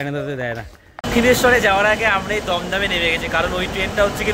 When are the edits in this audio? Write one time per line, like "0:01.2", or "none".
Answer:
0:01.0